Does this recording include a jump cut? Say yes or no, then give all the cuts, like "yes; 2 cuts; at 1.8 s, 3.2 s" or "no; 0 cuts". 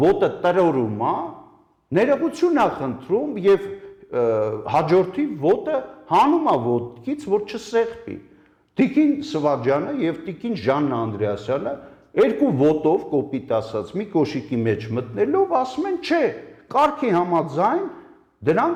no; 0 cuts